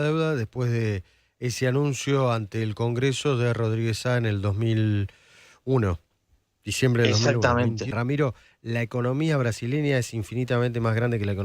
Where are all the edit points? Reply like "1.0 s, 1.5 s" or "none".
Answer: 7.9 s